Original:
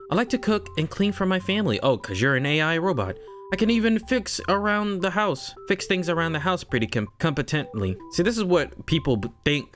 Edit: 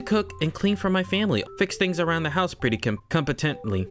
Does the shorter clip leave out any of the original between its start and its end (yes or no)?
yes